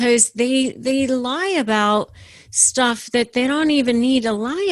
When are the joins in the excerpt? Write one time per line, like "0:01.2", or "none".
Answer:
none